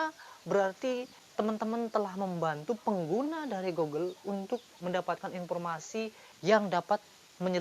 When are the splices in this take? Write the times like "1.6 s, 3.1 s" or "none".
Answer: 1.2 s, 4.7 s, 6.3 s